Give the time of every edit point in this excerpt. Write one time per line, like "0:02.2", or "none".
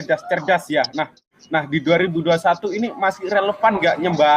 0:01.3